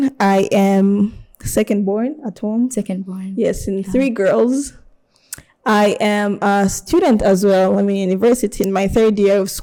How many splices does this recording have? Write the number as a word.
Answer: zero